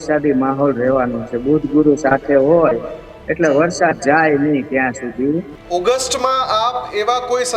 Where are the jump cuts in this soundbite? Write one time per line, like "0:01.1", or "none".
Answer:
0:05.5